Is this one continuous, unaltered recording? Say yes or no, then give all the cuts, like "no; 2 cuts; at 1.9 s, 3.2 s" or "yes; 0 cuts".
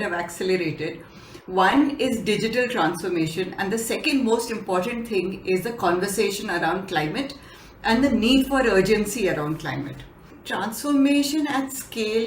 no; 1 cut; at 10.4 s